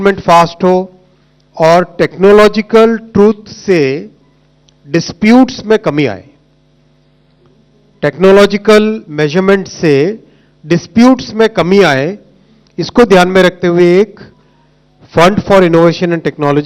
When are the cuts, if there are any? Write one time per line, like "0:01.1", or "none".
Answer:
none